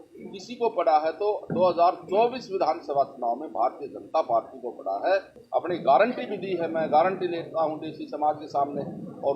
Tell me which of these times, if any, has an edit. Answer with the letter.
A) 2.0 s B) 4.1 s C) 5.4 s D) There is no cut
C